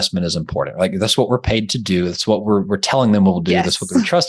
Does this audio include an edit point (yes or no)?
no